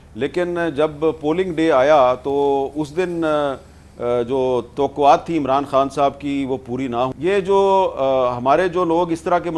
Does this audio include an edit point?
yes; 1 cut; at 7.1 s

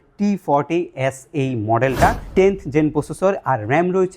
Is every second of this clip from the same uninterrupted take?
no; 1 cut; at 2.2 s

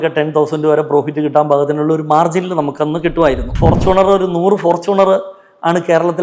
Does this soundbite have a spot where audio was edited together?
yes; 1 cut; at 3.5 s

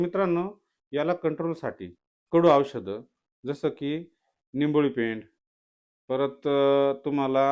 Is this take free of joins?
yes; 0 cuts

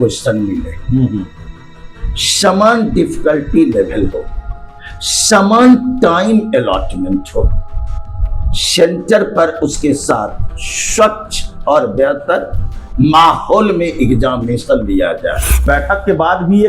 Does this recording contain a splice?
yes; 1 cut; at 15.6 s

